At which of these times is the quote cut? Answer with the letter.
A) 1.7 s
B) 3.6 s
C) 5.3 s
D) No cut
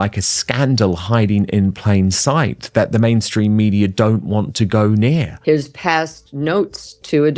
C